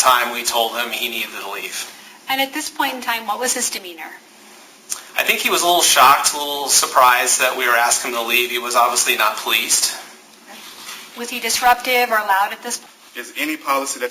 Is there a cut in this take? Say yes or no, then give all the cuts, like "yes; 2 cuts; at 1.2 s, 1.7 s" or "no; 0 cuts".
yes; 1 cut; at 12.7 s